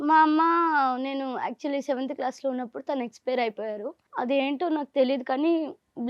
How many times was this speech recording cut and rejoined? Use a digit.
1